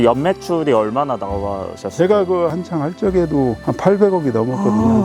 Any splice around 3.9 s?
no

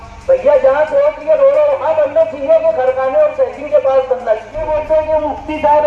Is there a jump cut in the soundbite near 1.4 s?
no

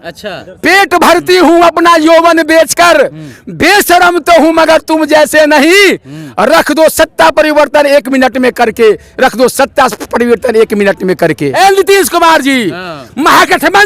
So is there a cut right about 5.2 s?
no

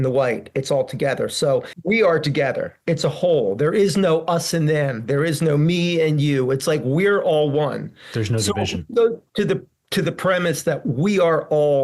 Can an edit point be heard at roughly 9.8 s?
no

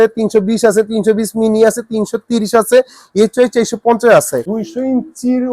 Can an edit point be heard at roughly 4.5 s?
yes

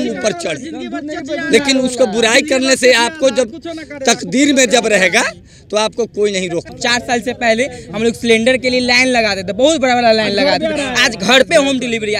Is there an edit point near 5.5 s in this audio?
no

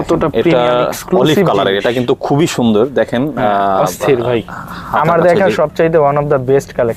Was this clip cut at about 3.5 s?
no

